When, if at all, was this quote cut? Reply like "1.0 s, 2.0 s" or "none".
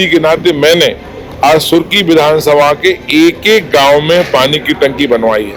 none